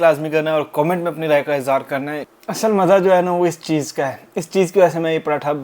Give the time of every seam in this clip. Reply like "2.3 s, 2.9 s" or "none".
2.3 s

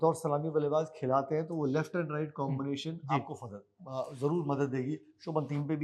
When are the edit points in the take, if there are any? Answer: none

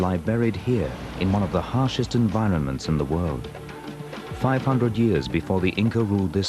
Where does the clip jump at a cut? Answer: 1.3 s

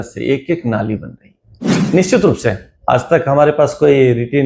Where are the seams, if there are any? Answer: 1.7 s

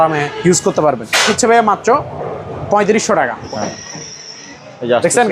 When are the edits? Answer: 1.3 s, 3.4 s

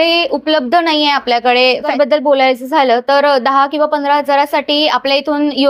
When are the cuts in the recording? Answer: 1.9 s

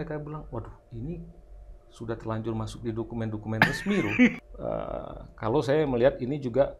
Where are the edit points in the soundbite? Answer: 4.4 s

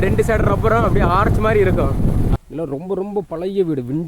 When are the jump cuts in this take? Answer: 2.3 s

